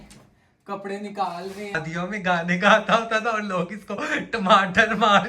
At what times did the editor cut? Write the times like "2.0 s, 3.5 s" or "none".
1.8 s